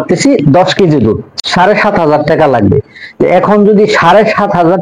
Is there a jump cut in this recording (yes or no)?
yes